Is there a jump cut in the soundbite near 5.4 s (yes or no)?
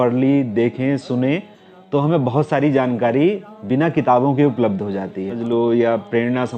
yes